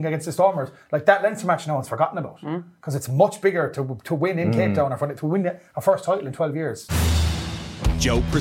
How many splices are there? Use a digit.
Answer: 1